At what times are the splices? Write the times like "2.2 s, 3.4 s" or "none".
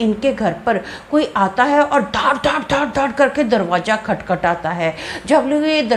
none